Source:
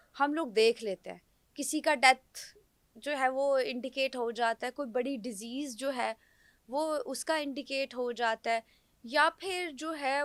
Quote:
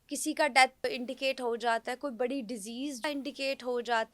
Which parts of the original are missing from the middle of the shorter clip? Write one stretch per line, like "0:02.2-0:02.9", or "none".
0:02.3-0:03.6
0:05.8-0:07.4